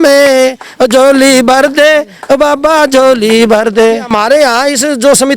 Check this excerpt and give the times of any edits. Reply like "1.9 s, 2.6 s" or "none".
4.1 s